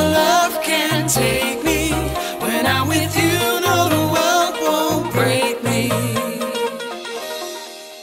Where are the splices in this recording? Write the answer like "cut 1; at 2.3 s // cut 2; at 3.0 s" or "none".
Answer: none

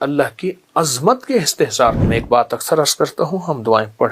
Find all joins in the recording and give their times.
cut 1; at 2.1 s

